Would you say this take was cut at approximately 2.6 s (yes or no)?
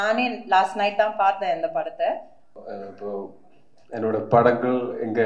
yes